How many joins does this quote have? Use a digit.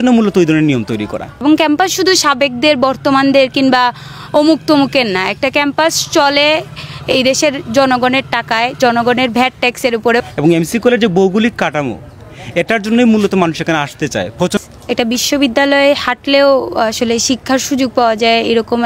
3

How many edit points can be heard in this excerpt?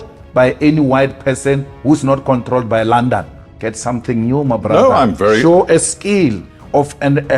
1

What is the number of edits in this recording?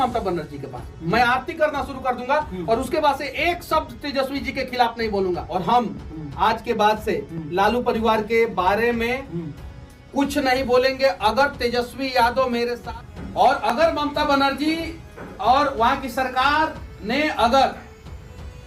2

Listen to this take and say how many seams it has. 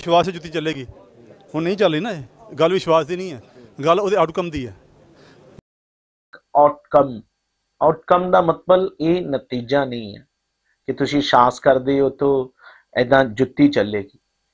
1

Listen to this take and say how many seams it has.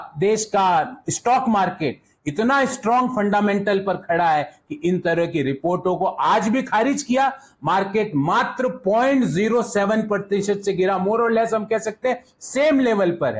0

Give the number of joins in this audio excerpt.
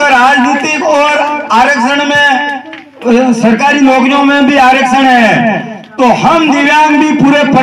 0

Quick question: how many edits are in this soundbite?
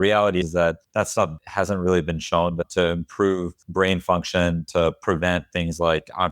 2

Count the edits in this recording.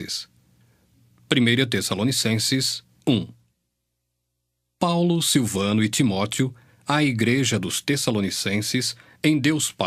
0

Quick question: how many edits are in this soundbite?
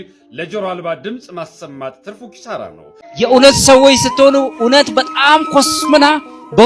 1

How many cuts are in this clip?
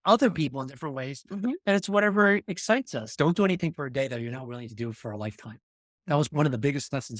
2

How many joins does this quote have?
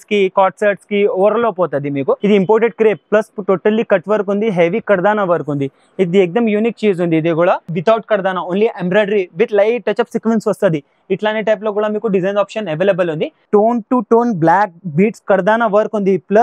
3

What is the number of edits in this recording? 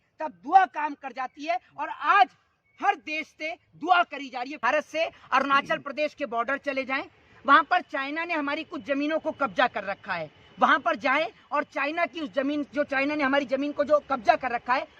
1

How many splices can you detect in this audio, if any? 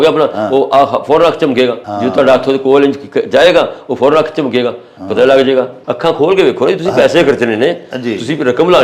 2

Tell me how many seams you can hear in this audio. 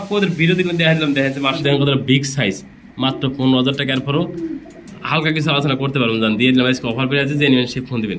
1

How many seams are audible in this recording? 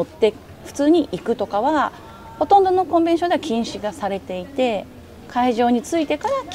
0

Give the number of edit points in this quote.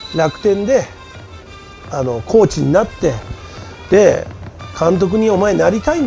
0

